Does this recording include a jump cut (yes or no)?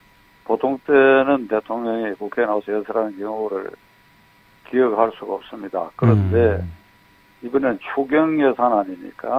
no